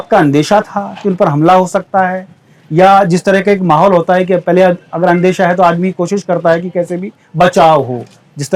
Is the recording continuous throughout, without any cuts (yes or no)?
yes